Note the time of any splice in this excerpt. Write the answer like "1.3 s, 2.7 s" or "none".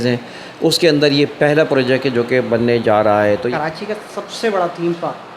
3.5 s